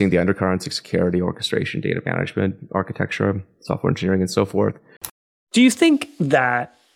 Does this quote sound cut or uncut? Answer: cut